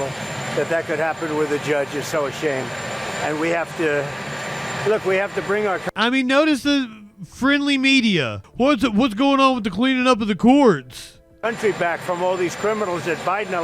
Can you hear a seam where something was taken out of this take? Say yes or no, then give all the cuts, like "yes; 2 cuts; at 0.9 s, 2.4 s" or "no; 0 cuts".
yes; 1 cut; at 8.4 s